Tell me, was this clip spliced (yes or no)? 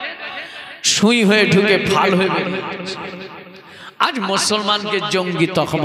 no